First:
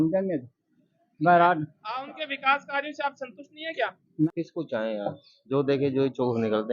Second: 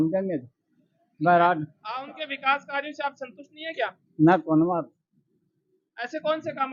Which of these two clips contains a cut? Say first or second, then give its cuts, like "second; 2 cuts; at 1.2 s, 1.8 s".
first; 1 cut; at 4.3 s